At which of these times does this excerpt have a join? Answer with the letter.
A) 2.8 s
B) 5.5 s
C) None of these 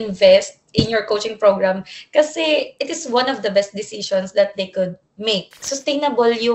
B